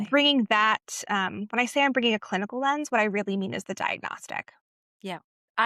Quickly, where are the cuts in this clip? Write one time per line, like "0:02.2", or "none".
none